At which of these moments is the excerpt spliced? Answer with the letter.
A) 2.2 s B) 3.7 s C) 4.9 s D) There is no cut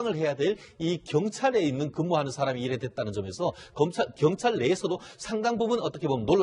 C